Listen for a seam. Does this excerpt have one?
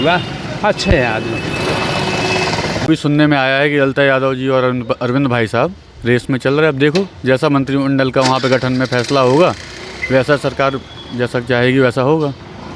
no; 0 cuts

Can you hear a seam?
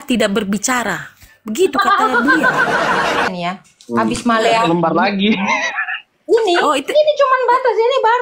yes; 1 cut; at 3.3 s

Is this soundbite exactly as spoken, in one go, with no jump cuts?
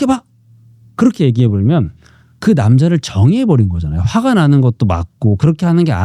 yes; 0 cuts

